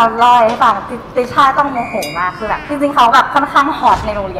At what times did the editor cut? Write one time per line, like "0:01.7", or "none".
0:02.7